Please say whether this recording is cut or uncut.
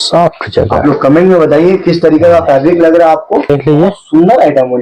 cut